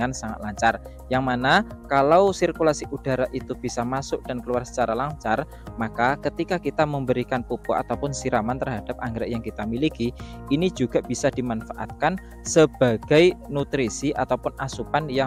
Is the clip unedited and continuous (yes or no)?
yes